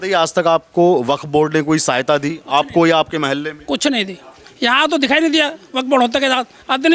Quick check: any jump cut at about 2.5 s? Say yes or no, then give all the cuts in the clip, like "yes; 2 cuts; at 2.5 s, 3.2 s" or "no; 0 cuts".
no; 0 cuts